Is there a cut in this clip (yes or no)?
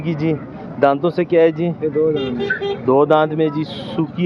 no